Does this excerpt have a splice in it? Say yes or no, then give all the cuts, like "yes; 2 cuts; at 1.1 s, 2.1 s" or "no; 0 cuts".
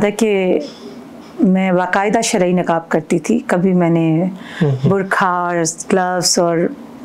no; 0 cuts